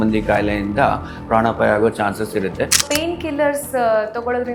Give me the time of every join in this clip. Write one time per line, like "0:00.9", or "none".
0:02.8